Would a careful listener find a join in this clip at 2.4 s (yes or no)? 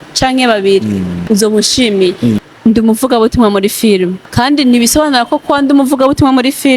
yes